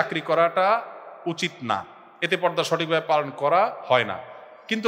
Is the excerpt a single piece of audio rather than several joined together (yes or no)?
yes